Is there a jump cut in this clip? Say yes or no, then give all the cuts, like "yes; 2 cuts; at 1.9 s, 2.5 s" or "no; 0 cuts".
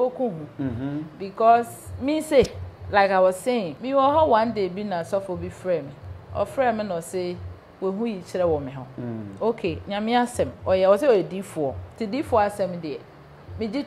yes; 2 cuts; at 3.8 s, 11.9 s